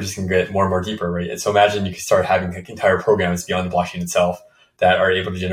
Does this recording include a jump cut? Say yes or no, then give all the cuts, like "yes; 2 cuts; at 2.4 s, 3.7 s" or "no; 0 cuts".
no; 0 cuts